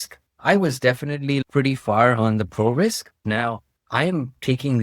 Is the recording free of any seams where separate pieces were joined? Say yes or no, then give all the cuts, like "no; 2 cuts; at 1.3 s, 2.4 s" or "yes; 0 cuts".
no; 2 cuts; at 1.4 s, 3.2 s